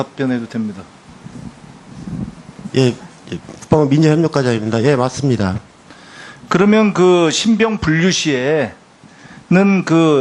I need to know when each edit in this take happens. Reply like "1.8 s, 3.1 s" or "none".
4.8 s